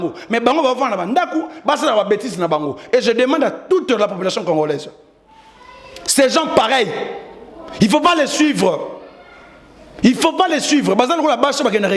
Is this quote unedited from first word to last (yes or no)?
yes